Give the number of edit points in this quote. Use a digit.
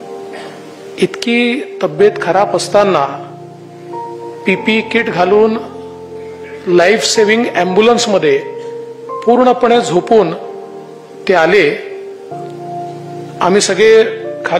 1